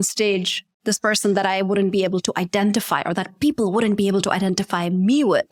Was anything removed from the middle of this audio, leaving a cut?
no; 0 cuts

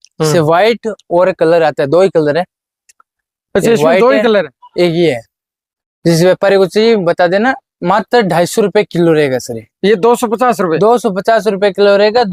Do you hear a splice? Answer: no; 0 cuts

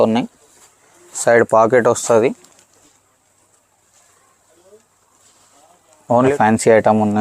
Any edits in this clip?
yes; 1 cut; at 6.3 s

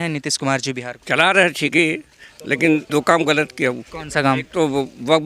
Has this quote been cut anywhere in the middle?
yes; 3 cuts; at 0.9 s, 2.9 s, 3.9 s

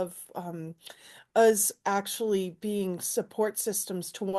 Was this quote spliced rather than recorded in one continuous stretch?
no; 0 cuts

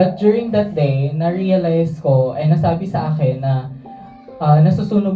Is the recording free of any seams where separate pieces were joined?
yes; 0 cuts

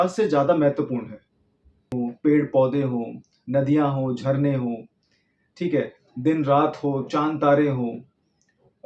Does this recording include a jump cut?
yes; 1 cut; at 1.9 s

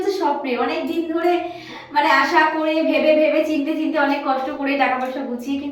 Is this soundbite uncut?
yes; 0 cuts

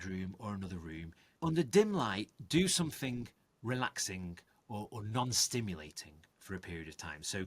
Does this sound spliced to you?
yes; 1 cut; at 1.2 s

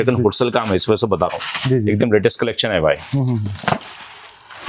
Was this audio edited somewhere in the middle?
no; 0 cuts

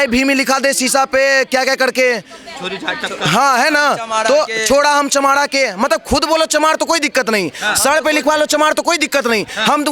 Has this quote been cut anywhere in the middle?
no; 0 cuts

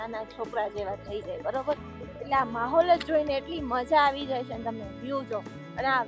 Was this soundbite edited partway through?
no; 0 cuts

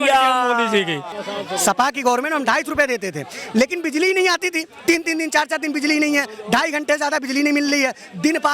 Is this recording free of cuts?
no; 1 cut; at 1.2 s

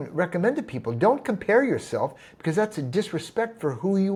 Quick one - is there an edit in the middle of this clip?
no; 0 cuts

